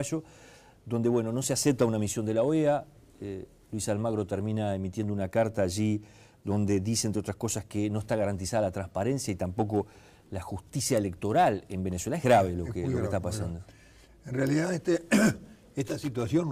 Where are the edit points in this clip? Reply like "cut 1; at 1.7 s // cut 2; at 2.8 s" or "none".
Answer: none